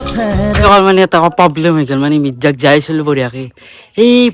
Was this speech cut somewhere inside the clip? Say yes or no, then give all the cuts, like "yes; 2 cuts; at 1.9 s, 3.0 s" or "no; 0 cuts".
no; 0 cuts